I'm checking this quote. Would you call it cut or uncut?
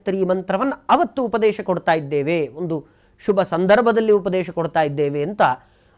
uncut